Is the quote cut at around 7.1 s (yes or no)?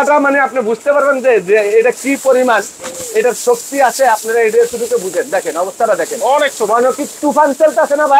no